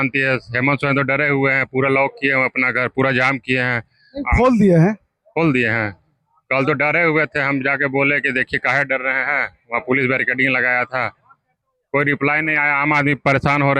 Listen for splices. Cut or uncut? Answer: uncut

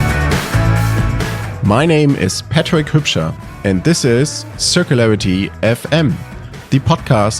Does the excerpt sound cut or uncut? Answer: cut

